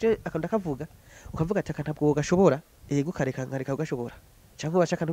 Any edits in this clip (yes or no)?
yes